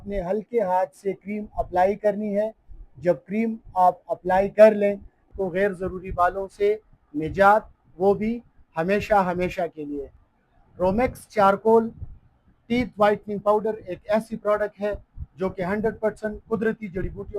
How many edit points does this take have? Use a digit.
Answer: 2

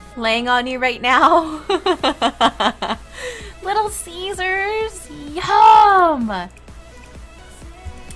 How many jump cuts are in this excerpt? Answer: 1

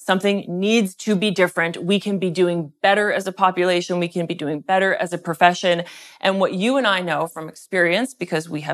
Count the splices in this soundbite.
0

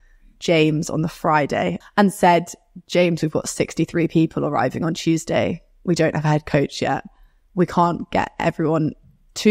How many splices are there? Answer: 1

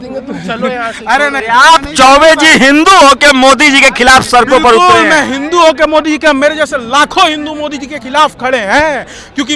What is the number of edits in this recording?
1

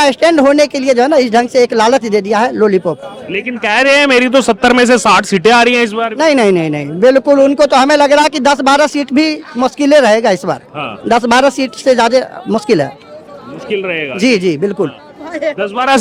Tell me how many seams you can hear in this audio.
0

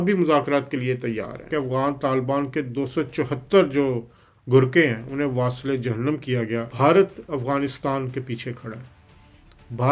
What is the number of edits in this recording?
2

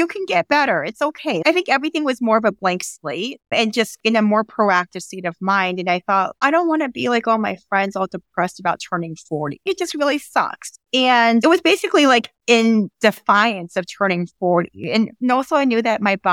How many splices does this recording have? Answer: 2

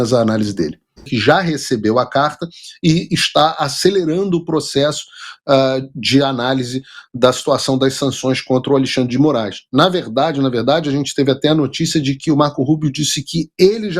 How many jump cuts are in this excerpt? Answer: 1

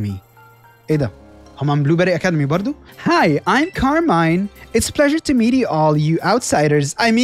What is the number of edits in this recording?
1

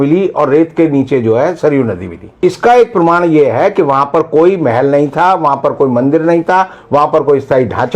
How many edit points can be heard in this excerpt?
1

